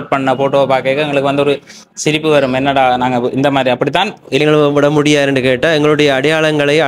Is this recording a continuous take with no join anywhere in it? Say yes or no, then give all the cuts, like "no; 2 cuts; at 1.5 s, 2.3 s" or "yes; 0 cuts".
no; 1 cut; at 4.4 s